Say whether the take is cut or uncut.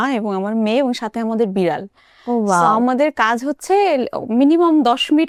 uncut